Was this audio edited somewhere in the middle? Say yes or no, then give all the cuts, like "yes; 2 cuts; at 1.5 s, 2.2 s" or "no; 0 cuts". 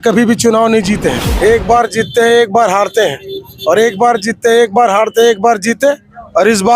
yes; 1 cut; at 1.2 s